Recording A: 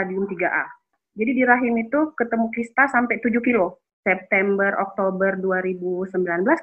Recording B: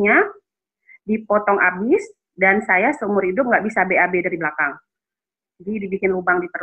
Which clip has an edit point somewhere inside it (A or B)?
A